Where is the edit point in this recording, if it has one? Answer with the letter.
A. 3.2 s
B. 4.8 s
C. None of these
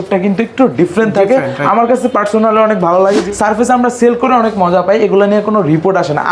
A